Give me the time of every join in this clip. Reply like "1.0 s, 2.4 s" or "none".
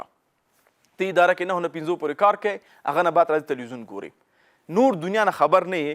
none

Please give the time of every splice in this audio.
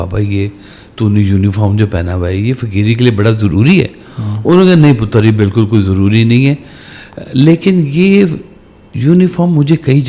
none

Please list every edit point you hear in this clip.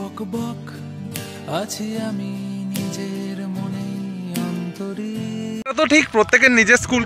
5.7 s

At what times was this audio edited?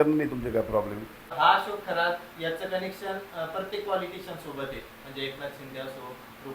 1.3 s

